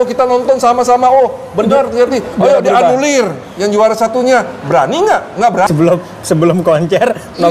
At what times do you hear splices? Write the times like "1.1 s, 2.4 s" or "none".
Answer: 5.7 s